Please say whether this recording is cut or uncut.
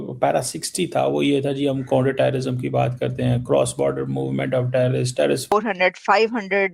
cut